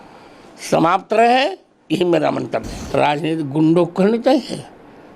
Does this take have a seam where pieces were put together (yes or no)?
yes